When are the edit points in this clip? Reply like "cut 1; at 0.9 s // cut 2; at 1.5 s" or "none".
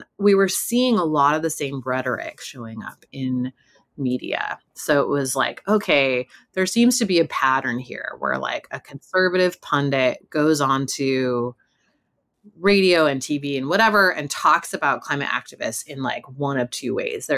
none

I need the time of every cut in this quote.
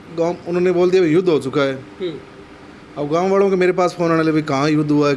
none

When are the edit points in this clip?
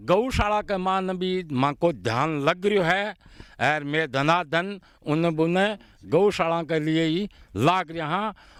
none

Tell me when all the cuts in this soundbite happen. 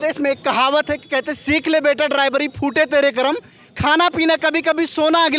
none

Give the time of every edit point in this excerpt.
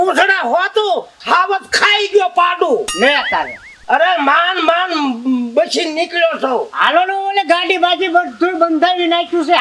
none

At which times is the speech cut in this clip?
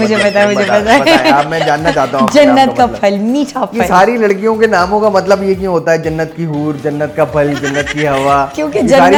none

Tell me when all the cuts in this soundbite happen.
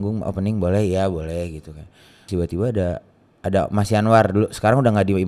cut 1; at 2.2 s

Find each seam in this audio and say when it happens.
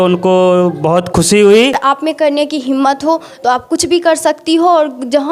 cut 1; at 1.8 s

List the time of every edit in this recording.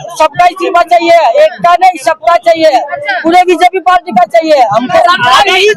cut 1; at 4.9 s

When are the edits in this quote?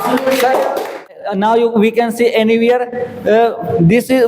cut 1; at 1.2 s

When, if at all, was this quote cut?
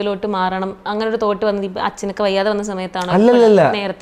none

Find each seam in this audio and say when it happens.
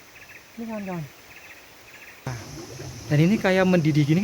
cut 1; at 2.4 s

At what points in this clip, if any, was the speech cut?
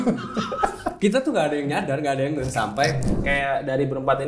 cut 1; at 3.1 s

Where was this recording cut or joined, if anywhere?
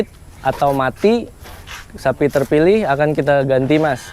none

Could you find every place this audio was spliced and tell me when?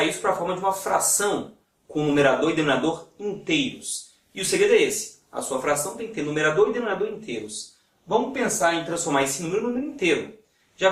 cut 1; at 3.6 s

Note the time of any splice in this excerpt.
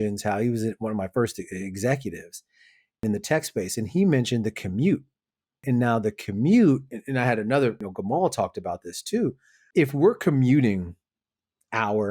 cut 1; at 3.0 s // cut 2; at 5.6 s // cut 3; at 9.5 s

